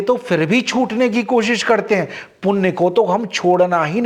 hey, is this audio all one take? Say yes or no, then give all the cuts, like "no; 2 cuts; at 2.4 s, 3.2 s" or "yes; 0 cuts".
yes; 0 cuts